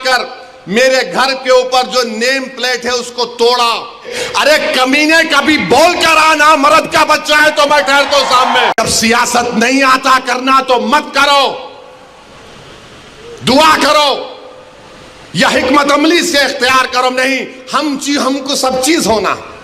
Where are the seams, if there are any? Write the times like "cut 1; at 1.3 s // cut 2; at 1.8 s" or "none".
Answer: cut 1; at 4.2 s // cut 2; at 8.8 s

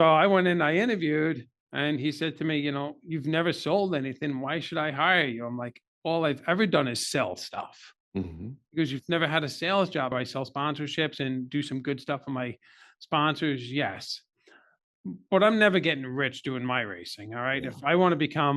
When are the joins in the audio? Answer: cut 1; at 10.1 s

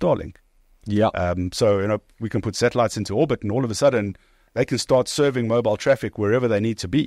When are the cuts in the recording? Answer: none

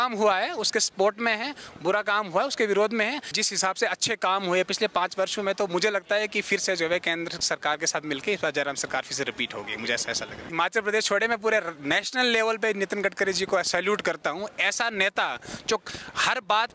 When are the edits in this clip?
cut 1; at 3.3 s // cut 2; at 10.5 s

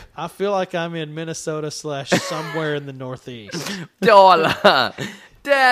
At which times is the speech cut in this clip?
cut 1; at 3.8 s

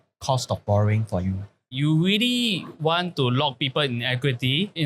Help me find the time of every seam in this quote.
cut 1; at 1.7 s

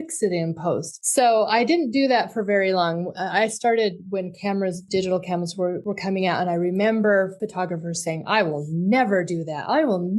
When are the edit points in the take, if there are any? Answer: cut 1; at 1.0 s // cut 2; at 4.8 s // cut 3; at 5.8 s // cut 4; at 7.4 s

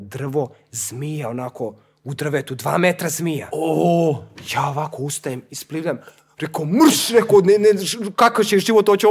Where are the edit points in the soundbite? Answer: none

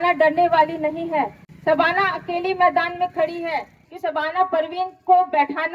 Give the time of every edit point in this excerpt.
cut 1; at 3.8 s

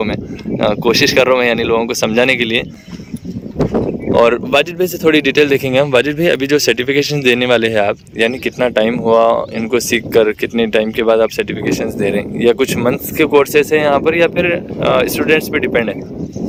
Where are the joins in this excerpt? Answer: none

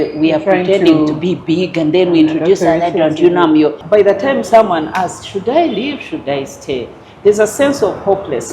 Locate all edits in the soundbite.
cut 1; at 3.8 s

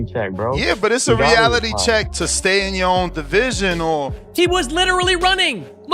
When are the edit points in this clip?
cut 1; at 4.2 s

